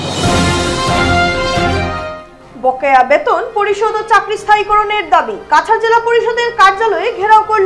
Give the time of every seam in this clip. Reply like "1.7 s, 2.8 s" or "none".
1.6 s